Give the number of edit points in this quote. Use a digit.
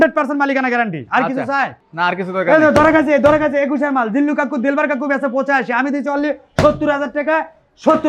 0